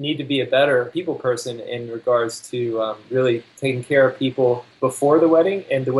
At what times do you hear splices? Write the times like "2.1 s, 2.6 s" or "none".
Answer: 0.9 s, 3.5 s, 4.7 s